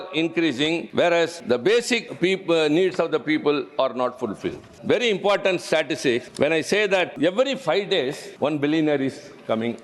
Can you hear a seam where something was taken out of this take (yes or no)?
yes